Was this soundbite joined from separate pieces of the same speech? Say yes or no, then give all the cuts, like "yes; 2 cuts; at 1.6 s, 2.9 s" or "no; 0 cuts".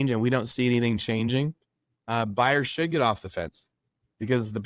no; 0 cuts